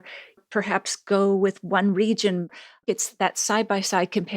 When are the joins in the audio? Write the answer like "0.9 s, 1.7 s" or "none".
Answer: 2.9 s